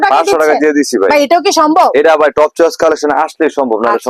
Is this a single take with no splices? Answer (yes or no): yes